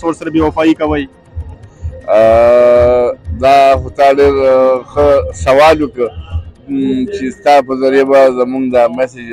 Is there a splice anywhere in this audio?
no; 0 cuts

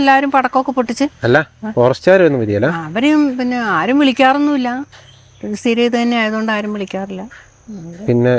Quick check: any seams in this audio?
no; 0 cuts

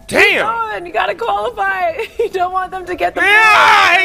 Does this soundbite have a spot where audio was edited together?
no; 0 cuts

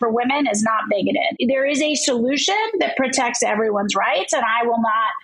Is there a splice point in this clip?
yes; 1 cut; at 1.3 s

